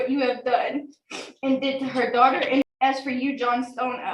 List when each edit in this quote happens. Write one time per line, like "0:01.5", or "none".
0:02.6